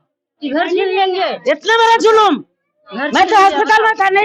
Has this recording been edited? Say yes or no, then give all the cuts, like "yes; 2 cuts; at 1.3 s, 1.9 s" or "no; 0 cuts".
no; 0 cuts